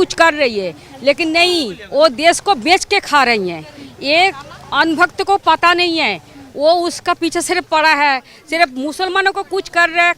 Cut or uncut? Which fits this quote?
uncut